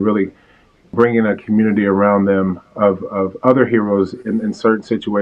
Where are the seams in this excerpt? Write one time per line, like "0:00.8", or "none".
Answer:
none